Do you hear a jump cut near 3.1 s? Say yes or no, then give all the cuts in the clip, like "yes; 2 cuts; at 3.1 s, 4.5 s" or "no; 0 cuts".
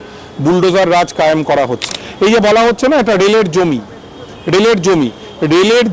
no; 1 cut; at 1.8 s